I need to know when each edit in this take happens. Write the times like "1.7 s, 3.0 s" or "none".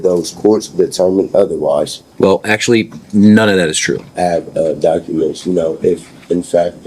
2.0 s, 4.1 s